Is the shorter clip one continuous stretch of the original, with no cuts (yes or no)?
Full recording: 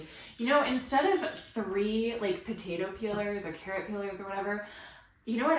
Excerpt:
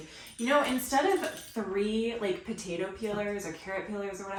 yes